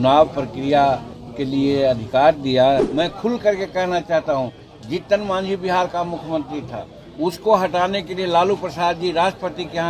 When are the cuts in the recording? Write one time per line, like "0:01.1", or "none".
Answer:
0:02.9